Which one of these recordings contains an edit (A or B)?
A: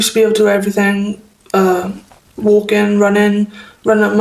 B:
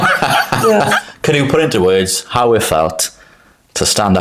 B